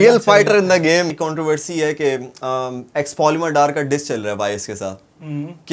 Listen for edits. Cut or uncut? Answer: cut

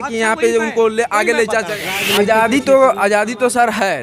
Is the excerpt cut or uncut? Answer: cut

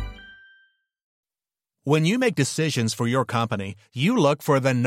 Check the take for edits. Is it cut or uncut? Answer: cut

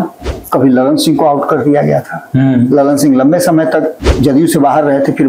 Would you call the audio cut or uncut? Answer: uncut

